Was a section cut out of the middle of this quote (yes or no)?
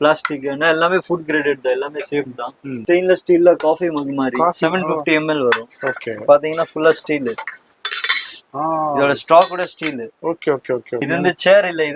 yes